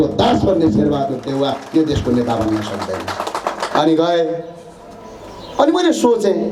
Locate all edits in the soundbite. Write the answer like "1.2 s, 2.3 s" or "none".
none